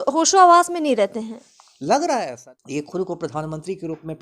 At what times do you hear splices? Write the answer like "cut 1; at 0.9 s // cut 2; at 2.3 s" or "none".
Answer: cut 1; at 2.3 s